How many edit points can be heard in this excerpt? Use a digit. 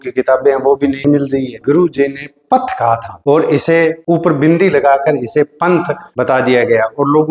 1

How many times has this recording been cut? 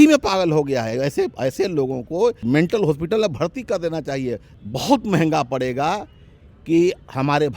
2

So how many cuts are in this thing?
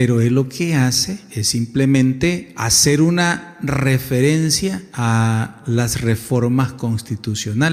0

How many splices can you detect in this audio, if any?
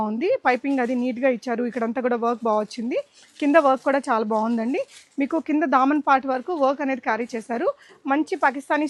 0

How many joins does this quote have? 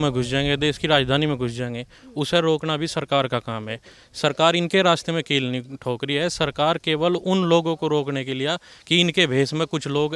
0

